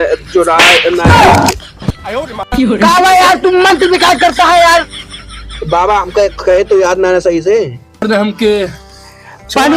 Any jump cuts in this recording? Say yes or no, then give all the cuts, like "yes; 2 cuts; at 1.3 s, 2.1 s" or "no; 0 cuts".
yes; 1 cut; at 8.0 s